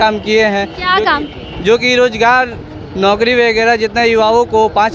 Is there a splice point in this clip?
no; 0 cuts

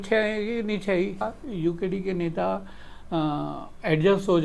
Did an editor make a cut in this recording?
yes; 1 cut; at 1.3 s

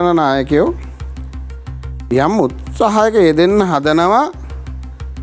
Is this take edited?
no; 0 cuts

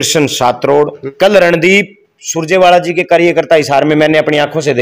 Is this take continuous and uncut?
no; 1 cut; at 1.0 s

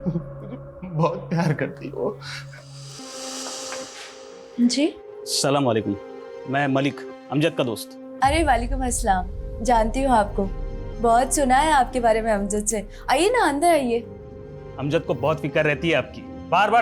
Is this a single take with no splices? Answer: no; 1 cut; at 3.0 s

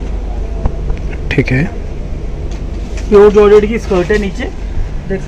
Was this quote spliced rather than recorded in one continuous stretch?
no; 0 cuts

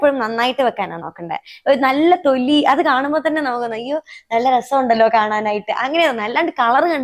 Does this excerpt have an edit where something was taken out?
no; 0 cuts

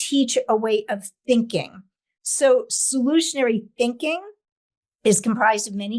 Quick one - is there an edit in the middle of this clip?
no; 0 cuts

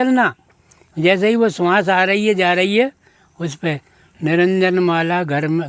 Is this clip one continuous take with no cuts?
yes; 0 cuts

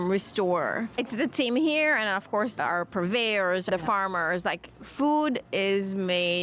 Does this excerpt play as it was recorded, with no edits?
no; 3 cuts; at 0.9 s, 2.6 s, 3.7 s

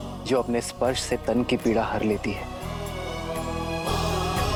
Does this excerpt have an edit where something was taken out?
no; 0 cuts

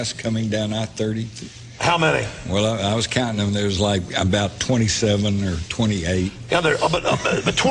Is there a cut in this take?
yes; 1 cut; at 3.3 s

